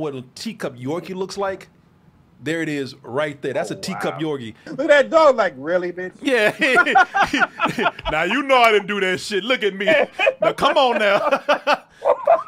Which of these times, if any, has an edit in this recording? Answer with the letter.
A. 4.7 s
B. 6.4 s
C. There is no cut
A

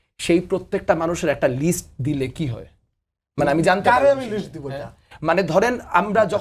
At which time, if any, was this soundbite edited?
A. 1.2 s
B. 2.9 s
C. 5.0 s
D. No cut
D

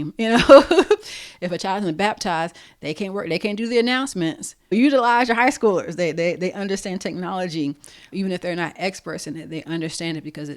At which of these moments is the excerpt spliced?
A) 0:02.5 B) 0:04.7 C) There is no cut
B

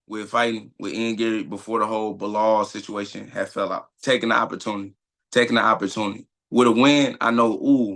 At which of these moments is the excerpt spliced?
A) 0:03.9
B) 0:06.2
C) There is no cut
A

